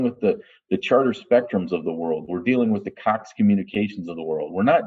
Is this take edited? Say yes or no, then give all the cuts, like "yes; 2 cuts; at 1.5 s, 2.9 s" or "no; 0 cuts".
no; 0 cuts